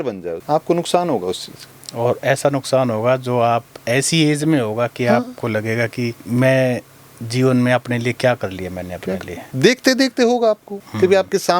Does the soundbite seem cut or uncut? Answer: uncut